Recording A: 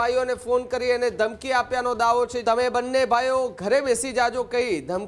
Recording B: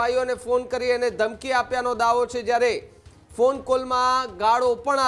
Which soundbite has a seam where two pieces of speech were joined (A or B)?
A